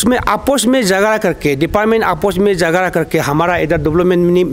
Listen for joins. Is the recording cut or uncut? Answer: uncut